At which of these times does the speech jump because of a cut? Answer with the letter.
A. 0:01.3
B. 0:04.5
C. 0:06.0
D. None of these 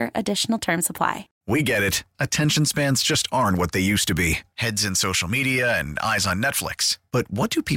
A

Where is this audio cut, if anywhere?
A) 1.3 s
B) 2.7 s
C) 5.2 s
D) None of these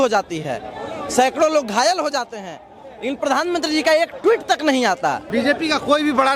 C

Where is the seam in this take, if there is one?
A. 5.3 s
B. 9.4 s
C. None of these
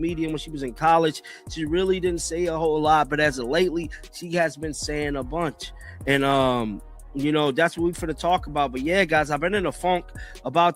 B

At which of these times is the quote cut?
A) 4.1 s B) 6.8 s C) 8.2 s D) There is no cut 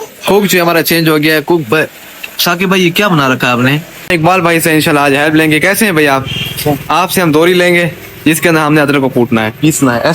A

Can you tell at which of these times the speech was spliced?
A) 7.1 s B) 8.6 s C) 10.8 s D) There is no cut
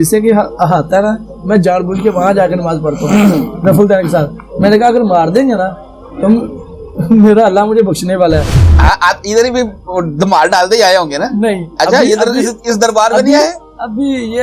B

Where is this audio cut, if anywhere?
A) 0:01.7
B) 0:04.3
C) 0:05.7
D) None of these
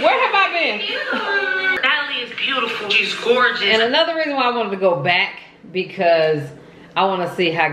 A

